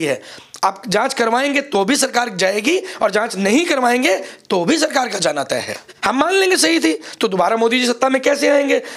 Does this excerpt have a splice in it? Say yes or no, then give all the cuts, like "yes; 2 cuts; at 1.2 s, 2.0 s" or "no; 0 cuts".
yes; 1 cut; at 5.9 s